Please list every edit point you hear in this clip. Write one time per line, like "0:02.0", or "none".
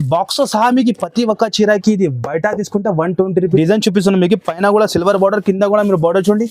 0:03.6